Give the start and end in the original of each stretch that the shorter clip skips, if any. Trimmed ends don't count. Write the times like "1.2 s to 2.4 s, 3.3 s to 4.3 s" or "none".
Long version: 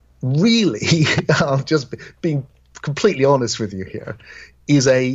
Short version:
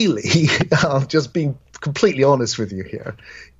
2.1 s to 2.5 s